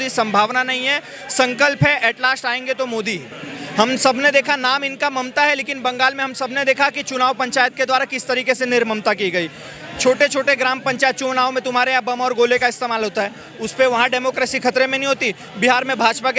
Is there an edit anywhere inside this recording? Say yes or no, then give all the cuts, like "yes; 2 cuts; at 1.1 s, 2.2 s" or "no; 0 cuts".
no; 0 cuts